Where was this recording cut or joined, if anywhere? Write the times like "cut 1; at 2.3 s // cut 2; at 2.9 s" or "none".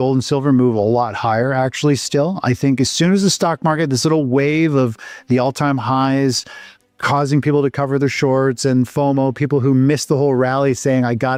none